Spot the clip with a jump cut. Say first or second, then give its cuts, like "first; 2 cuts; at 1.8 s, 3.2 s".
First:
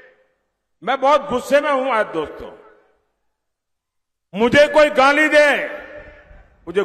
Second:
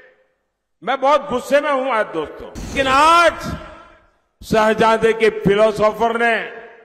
second; 1 cut; at 2.7 s